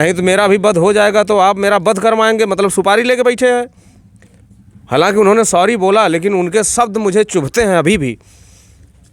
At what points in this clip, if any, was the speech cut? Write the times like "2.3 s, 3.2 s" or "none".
none

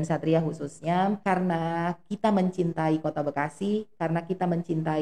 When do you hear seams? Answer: 1.2 s

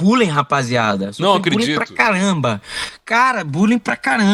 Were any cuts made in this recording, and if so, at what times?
none

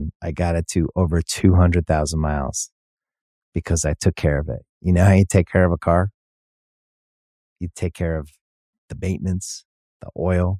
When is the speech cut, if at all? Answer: none

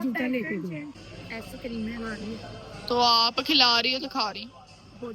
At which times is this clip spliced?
1.0 s

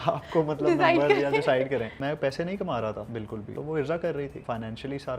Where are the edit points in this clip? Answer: 2.0 s, 3.5 s, 4.4 s

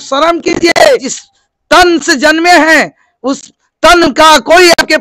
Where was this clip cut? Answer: 1.2 s

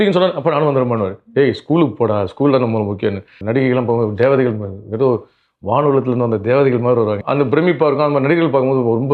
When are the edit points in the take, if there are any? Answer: 3.4 s, 7.2 s

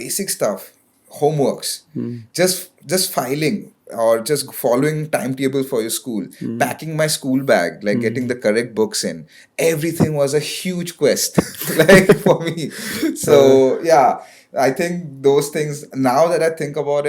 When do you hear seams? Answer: none

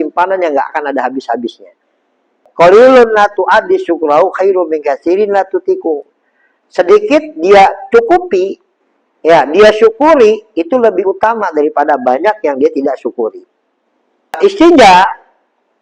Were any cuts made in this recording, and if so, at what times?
2.4 s, 14.4 s

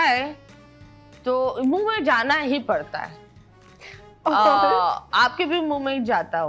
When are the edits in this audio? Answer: none

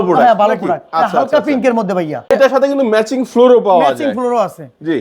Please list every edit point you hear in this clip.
2.3 s

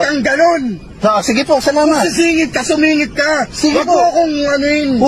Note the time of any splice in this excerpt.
3.7 s

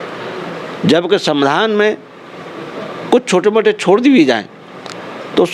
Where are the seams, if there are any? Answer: none

